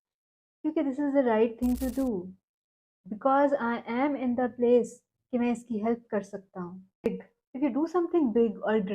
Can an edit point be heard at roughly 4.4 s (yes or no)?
no